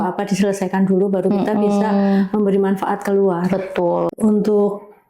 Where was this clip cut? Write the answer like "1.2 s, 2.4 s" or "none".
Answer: 4.1 s